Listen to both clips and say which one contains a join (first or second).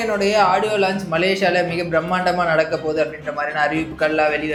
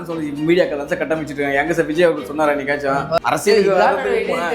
second